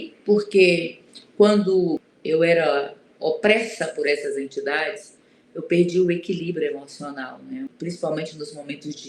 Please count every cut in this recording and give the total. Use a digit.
2